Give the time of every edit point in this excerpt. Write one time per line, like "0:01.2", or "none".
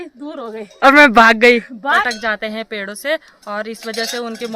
0:02.0